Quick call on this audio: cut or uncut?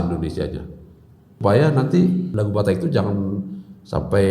cut